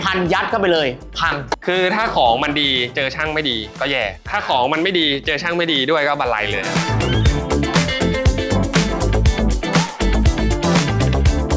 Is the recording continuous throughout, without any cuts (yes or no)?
yes